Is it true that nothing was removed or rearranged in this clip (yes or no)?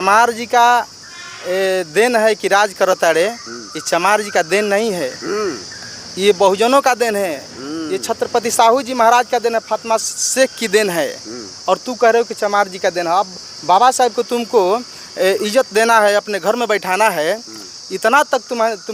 yes